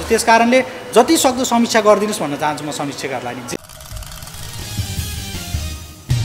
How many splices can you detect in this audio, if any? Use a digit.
1